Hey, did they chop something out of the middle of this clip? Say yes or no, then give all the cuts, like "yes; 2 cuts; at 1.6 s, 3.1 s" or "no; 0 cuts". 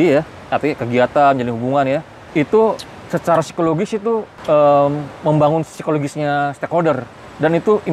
yes; 2 cuts; at 2.2 s, 4.3 s